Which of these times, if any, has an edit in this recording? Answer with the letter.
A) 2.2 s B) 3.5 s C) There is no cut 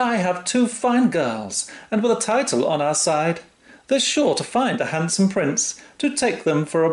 C